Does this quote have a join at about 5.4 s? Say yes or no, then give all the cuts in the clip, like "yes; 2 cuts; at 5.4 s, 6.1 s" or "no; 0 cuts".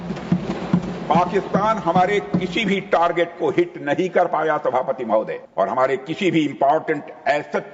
no; 0 cuts